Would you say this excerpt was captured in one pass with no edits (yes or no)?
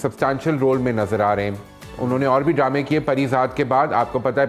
yes